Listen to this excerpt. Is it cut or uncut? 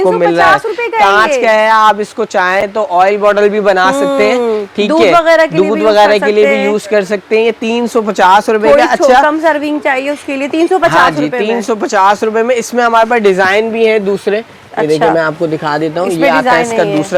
uncut